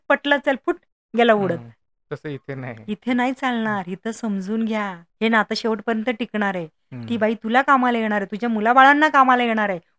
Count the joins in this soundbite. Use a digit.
1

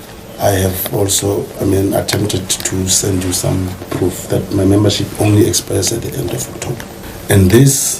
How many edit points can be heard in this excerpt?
1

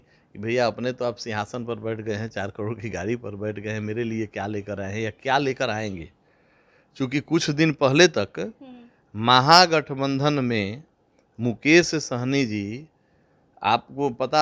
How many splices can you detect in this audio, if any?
0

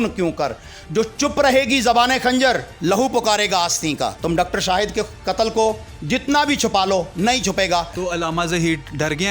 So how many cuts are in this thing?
2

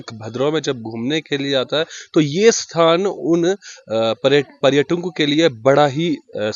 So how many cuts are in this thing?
0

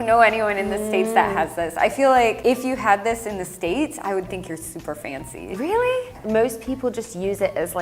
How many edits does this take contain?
0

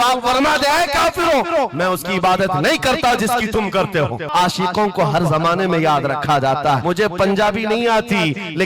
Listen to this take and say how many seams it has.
2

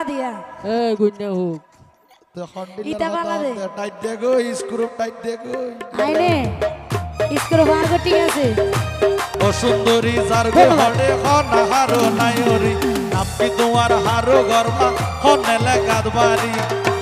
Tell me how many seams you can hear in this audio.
1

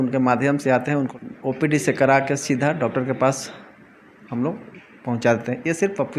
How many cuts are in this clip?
1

